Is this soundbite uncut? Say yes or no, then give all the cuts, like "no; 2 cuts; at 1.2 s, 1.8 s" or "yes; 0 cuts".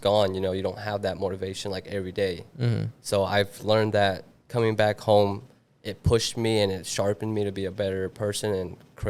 yes; 0 cuts